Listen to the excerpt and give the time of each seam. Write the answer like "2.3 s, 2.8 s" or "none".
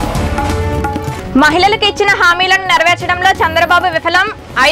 1.1 s